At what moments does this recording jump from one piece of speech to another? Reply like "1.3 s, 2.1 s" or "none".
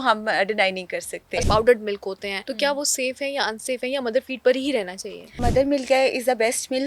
1.4 s, 2.4 s, 5.4 s